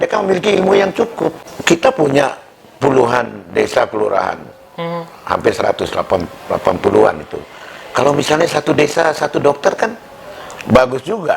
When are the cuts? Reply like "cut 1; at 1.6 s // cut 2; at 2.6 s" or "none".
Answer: cut 1; at 1.5 s